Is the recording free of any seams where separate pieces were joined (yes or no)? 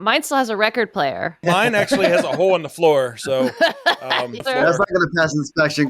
no